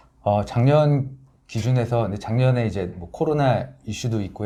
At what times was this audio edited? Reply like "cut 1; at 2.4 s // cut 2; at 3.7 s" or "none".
none